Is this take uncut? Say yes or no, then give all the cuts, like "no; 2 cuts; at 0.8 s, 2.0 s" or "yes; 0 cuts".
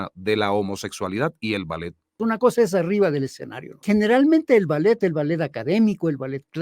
no; 2 cuts; at 2.1 s, 3.8 s